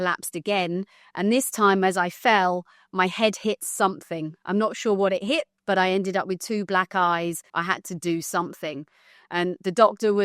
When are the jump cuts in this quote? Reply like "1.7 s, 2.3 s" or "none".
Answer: 5.5 s, 7.5 s